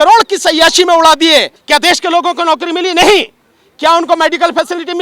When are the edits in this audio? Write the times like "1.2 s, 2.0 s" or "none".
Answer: 1.6 s